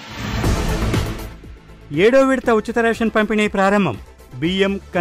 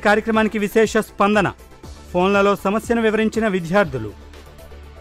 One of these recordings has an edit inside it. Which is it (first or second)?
first